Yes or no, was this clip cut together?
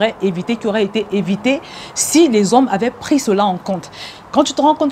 no